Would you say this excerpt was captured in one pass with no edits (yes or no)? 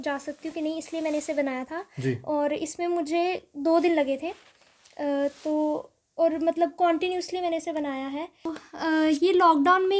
no